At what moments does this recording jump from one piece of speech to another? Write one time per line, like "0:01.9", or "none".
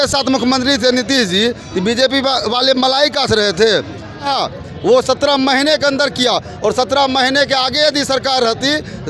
0:04.3

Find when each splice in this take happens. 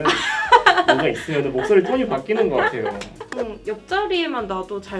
0:03.3

